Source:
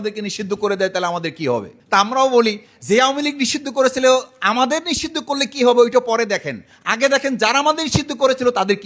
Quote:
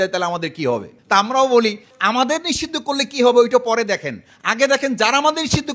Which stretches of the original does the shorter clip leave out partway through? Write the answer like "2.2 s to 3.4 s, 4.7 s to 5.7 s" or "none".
2.7 s to 4.3 s